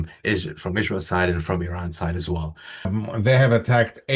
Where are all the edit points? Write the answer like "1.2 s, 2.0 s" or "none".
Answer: 2.9 s